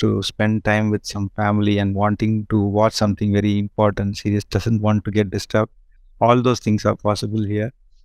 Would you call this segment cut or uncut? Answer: uncut